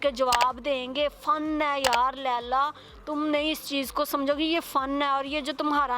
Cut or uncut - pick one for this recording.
uncut